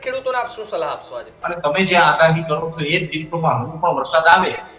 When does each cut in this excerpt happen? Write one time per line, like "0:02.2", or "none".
0:01.4